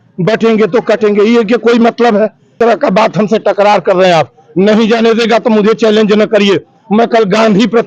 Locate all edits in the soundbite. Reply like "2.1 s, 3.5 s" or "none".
2.5 s